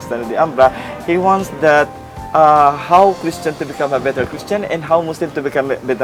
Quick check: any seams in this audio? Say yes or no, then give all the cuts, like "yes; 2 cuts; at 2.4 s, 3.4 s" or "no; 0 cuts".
no; 0 cuts